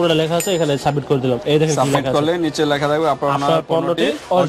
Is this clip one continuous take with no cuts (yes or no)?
yes